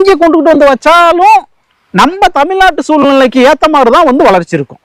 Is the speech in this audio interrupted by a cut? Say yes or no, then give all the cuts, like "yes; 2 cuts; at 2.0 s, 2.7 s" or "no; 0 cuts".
no; 0 cuts